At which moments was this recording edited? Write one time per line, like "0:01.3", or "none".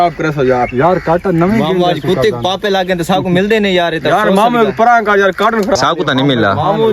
0:05.8